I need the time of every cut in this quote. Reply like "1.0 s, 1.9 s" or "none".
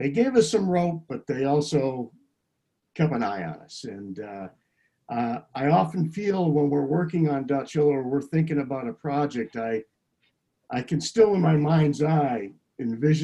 none